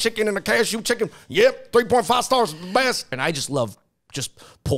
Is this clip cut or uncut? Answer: cut